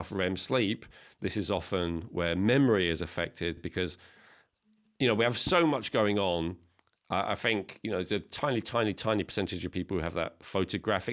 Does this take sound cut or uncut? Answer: uncut